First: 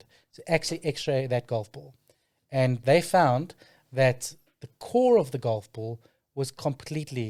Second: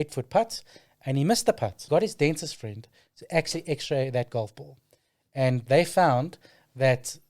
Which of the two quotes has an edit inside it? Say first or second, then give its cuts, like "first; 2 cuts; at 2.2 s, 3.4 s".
second; 1 cut; at 1.8 s